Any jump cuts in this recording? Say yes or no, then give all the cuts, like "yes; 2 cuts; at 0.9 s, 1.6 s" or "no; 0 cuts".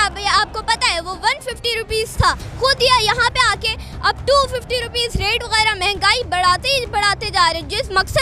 yes; 1 cut; at 2.5 s